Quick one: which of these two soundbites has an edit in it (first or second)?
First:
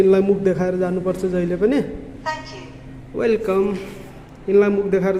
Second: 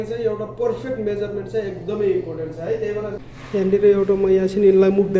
second